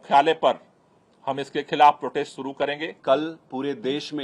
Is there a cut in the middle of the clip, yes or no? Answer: no